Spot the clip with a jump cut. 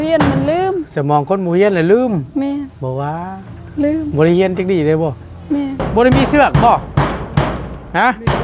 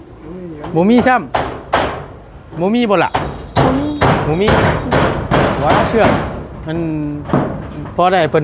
first; 1 cut; at 5.8 s

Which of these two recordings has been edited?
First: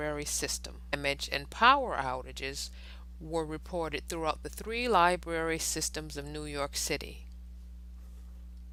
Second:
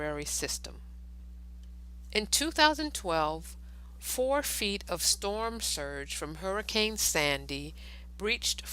second; 1 cut; at 0.9 s

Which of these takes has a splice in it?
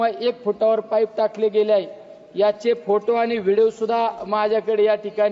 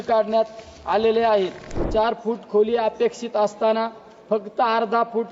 second; 1 cut; at 1.8 s

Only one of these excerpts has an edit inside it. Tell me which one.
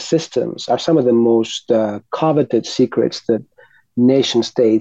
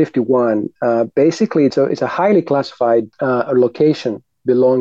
second; 2 cuts; at 1.7 s, 3.1 s

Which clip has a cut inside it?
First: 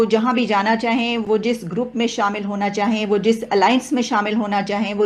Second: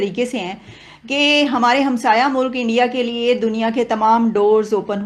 first; 1 cut; at 1.2 s

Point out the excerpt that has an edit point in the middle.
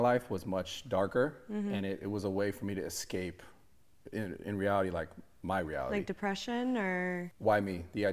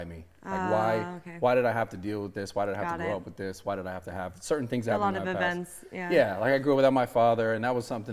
first; 1 cut; at 7.1 s

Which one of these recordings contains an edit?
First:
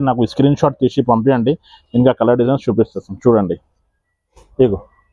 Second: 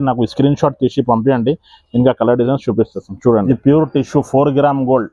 second; 1 cut; at 3.5 s

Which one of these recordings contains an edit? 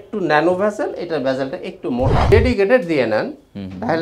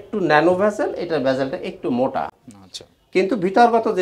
first; 1 cut; at 2.2 s

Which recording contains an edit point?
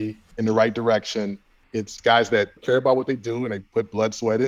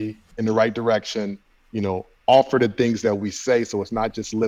first; 2 cuts; at 1.8 s, 2.6 s

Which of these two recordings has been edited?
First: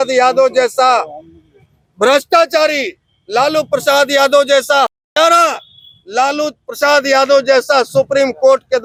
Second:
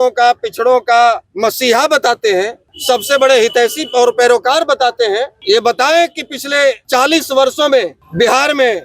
second; 5 cuts; at 1.3 s, 2.7 s, 5.4 s, 6.8 s, 8.0 s

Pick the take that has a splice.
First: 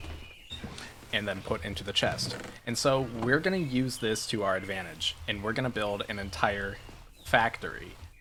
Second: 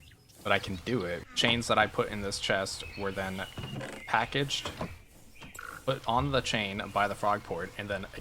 second; 1 cut; at 1.3 s

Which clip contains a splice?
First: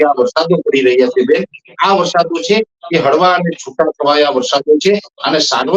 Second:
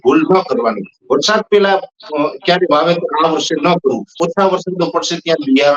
second; 1 cut; at 4.2 s

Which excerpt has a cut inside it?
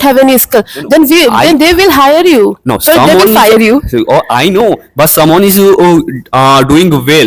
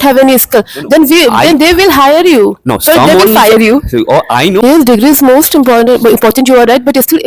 second; 1 cut; at 4.6 s

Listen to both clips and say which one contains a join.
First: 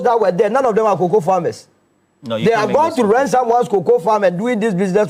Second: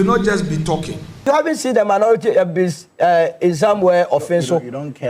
second; 1 cut; at 1.2 s

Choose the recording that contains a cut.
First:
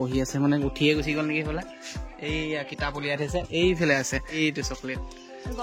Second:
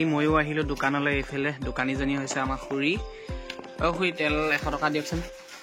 first; 1 cut; at 4.4 s

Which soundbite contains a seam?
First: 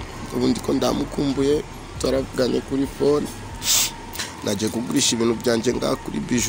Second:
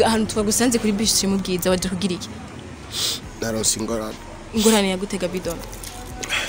second; 1 cut; at 3.3 s

